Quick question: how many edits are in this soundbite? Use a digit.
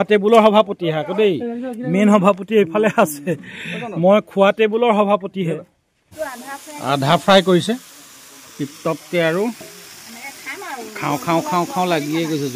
1